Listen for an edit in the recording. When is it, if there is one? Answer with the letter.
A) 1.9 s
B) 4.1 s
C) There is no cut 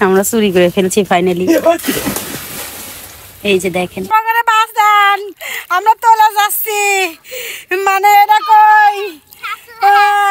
B